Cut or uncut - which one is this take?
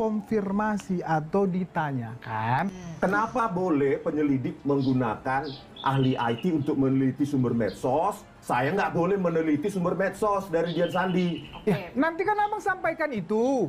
cut